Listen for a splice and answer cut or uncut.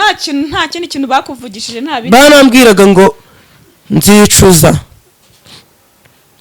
uncut